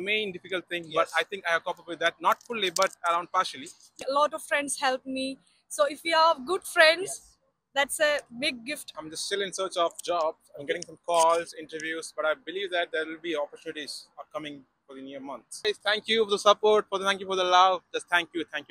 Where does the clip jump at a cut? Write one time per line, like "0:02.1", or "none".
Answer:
0:03.9
0:09.0
0:15.6

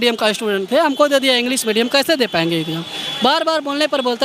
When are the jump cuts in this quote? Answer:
none

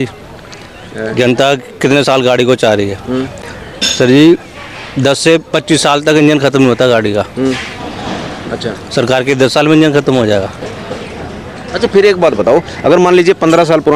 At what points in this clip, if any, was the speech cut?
none

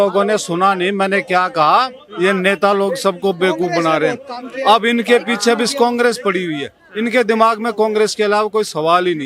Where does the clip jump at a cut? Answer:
none

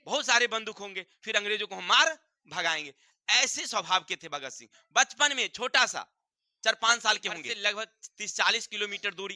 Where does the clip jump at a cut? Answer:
0:07.5

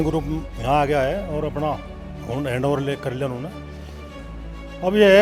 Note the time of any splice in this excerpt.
none

